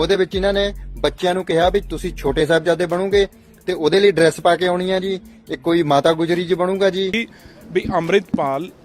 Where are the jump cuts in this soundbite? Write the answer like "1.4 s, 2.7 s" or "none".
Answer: 7.3 s